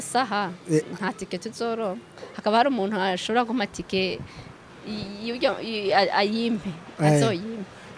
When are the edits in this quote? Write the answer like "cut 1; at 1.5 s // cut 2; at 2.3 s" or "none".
none